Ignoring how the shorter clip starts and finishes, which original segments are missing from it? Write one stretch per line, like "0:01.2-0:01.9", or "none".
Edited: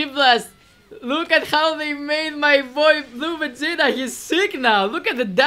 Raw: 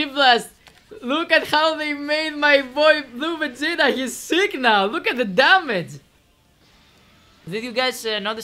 none